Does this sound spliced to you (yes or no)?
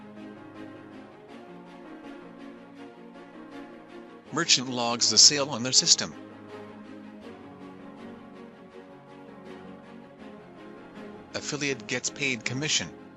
no